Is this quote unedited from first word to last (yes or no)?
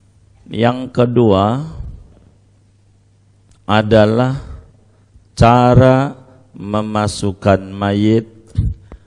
yes